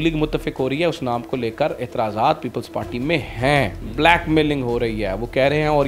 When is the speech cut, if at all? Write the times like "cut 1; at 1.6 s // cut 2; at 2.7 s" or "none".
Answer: cut 1; at 3.8 s